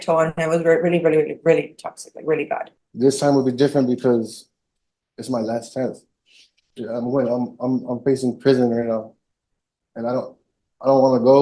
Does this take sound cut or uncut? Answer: cut